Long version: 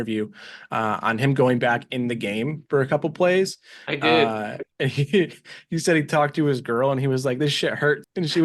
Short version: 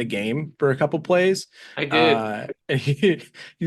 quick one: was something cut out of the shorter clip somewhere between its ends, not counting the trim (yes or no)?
no